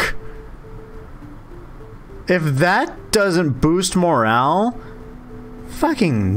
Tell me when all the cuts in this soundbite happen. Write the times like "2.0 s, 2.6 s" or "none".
none